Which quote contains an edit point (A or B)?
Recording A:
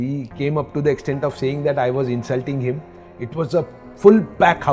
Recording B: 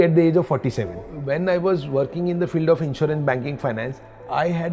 B